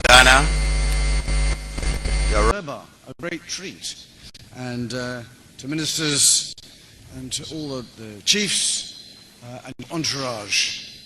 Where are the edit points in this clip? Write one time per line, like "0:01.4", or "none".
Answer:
0:02.5